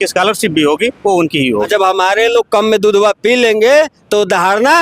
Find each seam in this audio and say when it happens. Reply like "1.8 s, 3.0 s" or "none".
1.7 s